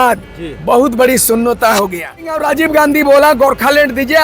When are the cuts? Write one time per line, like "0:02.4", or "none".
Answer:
0:02.4